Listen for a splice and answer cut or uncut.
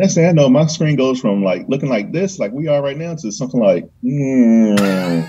uncut